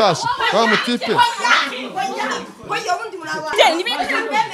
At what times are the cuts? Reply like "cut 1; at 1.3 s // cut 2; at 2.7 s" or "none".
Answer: cut 1; at 3.5 s